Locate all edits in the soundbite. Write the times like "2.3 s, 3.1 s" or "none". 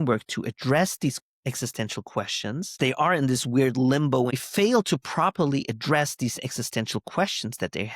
2.7 s, 4.4 s